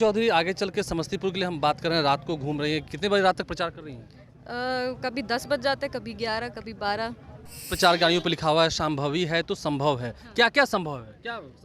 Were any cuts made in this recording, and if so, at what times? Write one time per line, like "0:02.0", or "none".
0:07.6